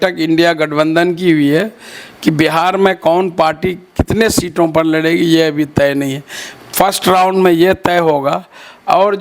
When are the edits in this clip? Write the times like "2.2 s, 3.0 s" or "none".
none